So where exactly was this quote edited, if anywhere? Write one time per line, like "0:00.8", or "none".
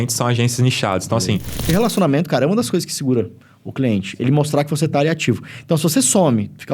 0:01.7